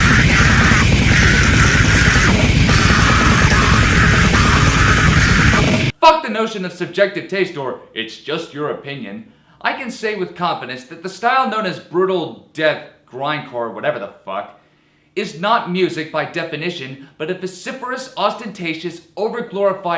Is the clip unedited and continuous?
yes; 0 cuts

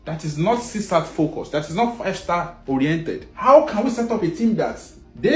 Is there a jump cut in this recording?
no; 0 cuts

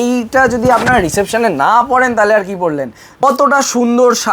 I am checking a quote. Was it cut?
yes; 1 cut; at 3.0 s

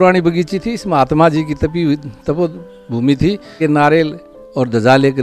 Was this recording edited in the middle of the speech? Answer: yes; 1 cut; at 3.5 s

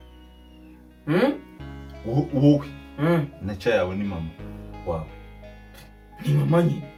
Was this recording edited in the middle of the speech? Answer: no; 0 cuts

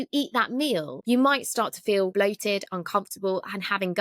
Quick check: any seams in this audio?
yes; 2 cuts; at 0.9 s, 2.1 s

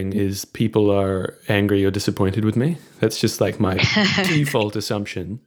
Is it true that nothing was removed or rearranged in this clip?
yes; 0 cuts

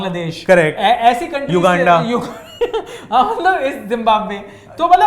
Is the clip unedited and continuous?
yes; 0 cuts

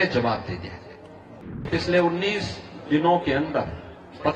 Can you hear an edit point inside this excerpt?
yes; 1 cut; at 1.3 s

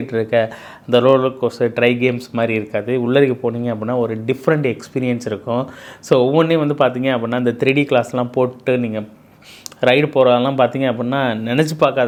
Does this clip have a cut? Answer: no; 0 cuts

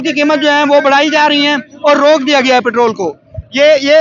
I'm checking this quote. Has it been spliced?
no; 0 cuts

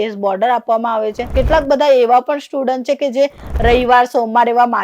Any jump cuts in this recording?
yes; 1 cut; at 1.3 s

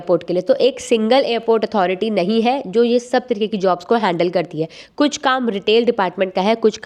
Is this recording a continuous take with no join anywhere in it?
yes; 0 cuts

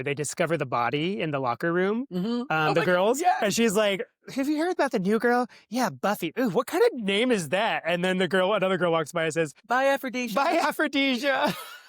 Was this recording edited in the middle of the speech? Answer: yes; 1 cut; at 9.6 s

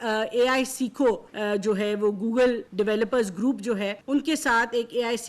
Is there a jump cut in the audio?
yes; 3 cuts; at 1.3 s, 2.6 s, 4.0 s

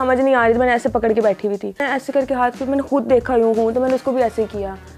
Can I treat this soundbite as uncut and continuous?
no; 1 cut; at 1.9 s

